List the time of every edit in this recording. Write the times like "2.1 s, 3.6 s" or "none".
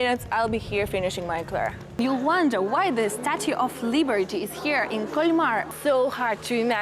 2.0 s, 5.7 s